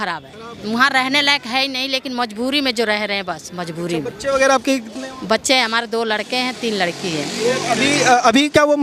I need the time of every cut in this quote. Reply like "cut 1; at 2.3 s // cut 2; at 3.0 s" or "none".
none